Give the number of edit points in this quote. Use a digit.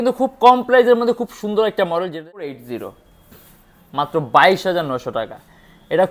1